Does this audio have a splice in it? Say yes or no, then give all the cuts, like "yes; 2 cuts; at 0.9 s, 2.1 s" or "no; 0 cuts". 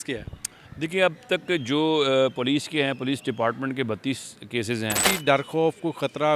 yes; 1 cut; at 5.1 s